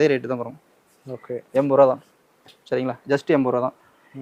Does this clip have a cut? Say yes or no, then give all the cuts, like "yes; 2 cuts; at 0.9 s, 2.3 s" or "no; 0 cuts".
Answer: no; 0 cuts